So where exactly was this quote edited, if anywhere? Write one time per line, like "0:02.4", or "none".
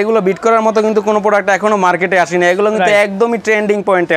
none